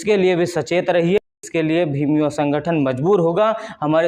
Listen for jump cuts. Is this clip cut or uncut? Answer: cut